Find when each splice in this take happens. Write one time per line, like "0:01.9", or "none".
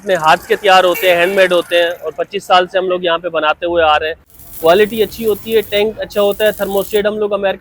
0:04.4

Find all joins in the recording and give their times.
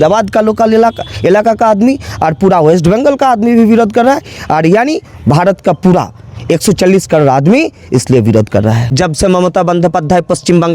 0:08.9

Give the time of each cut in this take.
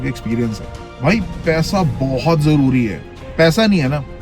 0:01.1
0:03.1

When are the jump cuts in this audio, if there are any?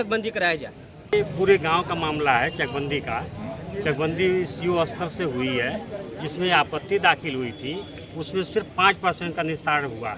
0:01.1

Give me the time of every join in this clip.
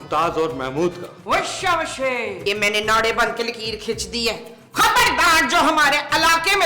0:02.4

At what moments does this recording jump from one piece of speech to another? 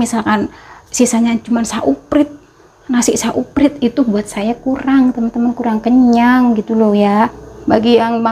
0:07.2

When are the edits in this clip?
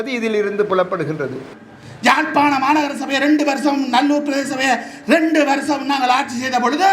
0:01.5

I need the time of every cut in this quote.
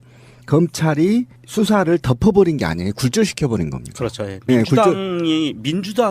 0:01.6

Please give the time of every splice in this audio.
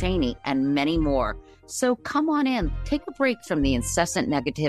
none

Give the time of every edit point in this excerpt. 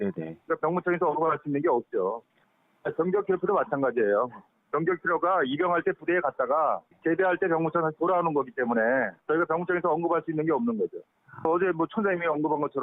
none

